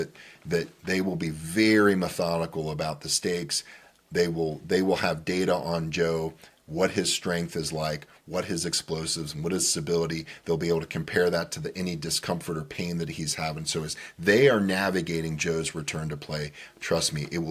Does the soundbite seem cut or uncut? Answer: uncut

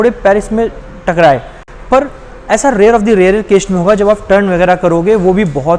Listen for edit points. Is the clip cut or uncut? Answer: uncut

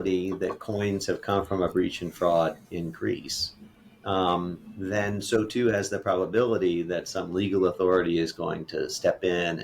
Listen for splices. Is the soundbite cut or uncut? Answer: uncut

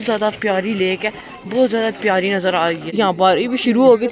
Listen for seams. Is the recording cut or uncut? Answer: cut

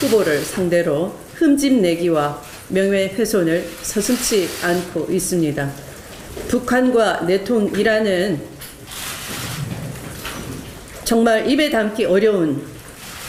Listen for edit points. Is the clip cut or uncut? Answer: uncut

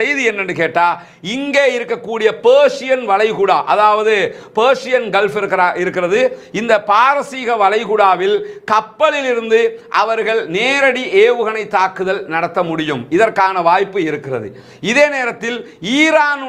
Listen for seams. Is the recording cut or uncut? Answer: uncut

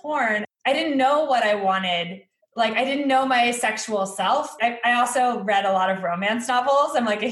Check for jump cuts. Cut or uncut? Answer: cut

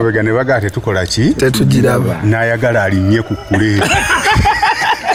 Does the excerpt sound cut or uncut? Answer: uncut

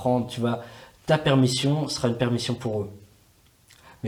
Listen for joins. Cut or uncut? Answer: uncut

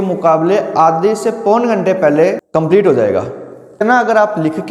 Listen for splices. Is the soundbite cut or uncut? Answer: cut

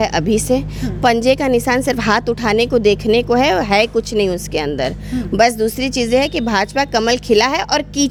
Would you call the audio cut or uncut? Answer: uncut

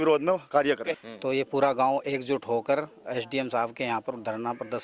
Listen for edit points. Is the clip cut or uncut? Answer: cut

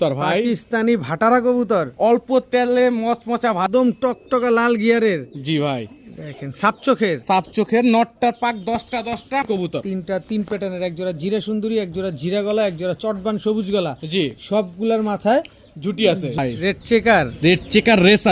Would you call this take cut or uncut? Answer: cut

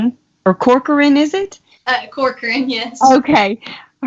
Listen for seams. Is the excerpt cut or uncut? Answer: cut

